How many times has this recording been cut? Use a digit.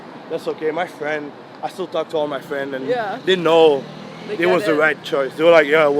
0